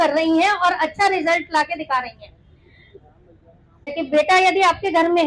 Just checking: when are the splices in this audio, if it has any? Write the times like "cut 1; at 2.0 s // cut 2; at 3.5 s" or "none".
cut 1; at 4.0 s